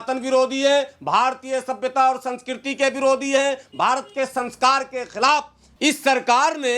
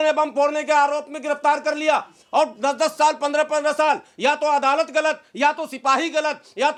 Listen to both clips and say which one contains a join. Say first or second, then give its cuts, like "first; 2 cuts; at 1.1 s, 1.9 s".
first; 1 cut; at 5.6 s